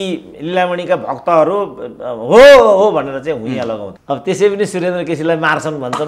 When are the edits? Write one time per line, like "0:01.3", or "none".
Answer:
0:03.9